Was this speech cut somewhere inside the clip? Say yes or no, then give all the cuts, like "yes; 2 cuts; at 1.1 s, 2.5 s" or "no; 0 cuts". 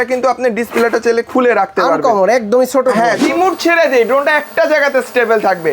yes; 1 cut; at 3.2 s